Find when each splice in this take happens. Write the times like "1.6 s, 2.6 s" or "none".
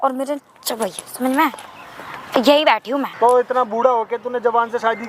3.1 s